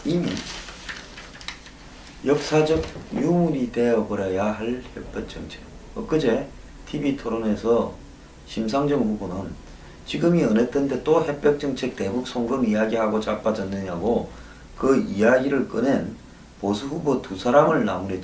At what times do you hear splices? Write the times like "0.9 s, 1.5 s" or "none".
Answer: 5.0 s